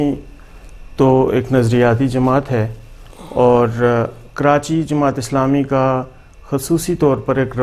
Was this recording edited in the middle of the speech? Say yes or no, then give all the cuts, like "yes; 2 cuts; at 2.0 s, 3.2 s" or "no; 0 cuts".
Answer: no; 0 cuts